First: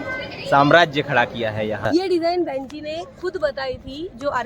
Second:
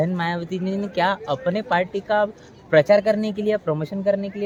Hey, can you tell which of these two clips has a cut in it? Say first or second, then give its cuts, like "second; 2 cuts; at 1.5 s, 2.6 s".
first; 1 cut; at 1.8 s